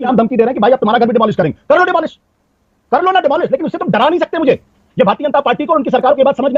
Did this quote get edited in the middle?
yes; 1 cut; at 4.7 s

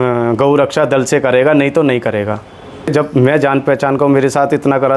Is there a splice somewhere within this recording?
yes; 1 cut; at 2.9 s

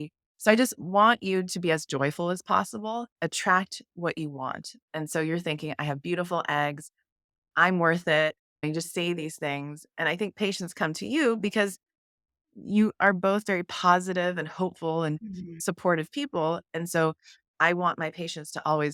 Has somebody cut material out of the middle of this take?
no; 0 cuts

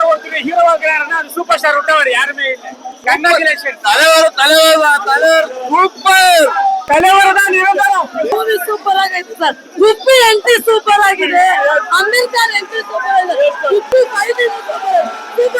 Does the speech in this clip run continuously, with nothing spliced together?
no; 1 cut; at 8.3 s

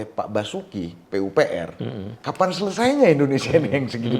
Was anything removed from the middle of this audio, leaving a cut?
yes; 1 cut; at 2.2 s

